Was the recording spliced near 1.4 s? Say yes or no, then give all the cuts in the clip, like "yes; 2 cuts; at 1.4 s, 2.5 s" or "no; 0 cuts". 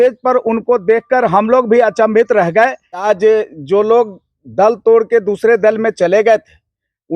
no; 1 cut; at 3.0 s